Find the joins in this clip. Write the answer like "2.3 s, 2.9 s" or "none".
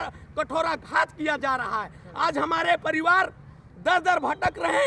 none